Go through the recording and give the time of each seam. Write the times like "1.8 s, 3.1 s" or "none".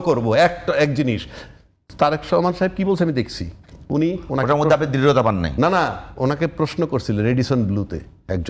none